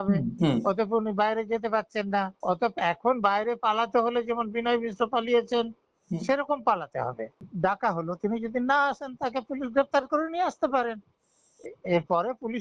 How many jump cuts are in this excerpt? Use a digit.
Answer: 2